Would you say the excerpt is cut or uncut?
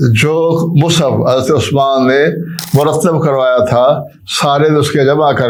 uncut